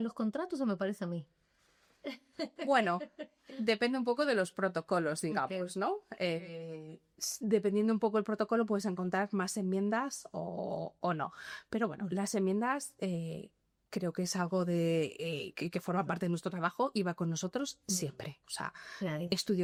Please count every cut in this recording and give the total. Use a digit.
0